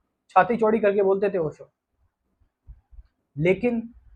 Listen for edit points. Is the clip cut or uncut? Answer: uncut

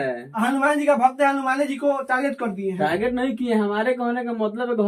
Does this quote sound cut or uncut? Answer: uncut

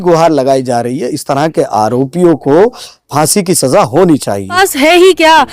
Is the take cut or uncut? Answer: cut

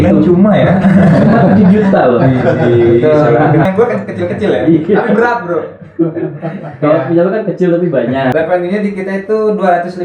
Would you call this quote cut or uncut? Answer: cut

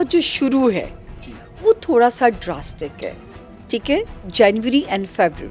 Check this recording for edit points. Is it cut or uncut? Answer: uncut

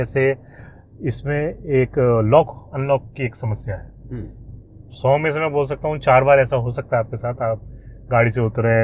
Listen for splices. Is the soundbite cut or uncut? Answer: uncut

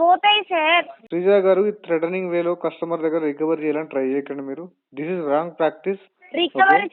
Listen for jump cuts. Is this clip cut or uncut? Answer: cut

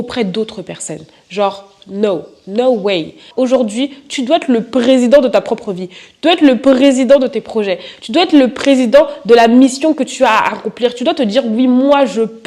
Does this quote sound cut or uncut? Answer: cut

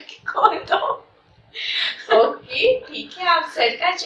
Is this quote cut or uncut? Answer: uncut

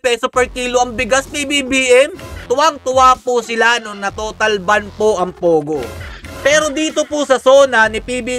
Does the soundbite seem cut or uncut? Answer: cut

